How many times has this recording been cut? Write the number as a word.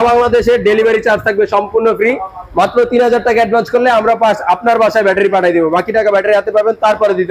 zero